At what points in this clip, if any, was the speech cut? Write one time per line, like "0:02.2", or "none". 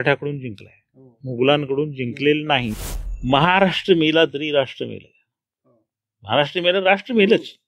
0:02.7